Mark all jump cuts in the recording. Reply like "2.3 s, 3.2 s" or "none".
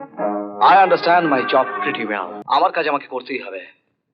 2.3 s